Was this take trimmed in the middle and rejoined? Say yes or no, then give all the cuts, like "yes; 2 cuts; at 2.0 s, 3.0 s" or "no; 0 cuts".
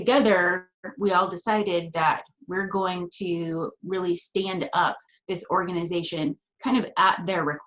yes; 1 cut; at 5.1 s